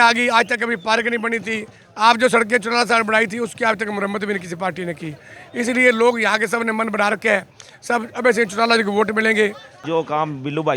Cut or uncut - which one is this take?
cut